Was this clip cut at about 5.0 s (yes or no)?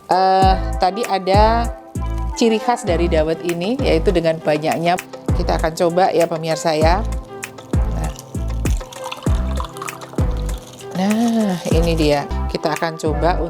yes